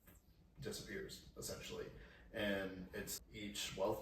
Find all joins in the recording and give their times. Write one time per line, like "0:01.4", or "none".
0:03.1